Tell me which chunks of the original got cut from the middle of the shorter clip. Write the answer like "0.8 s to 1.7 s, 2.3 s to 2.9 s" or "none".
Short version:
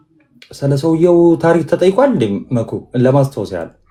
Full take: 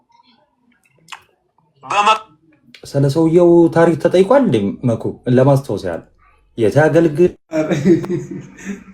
none